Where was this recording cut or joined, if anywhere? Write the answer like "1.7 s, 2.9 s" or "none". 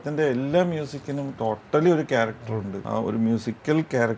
2.8 s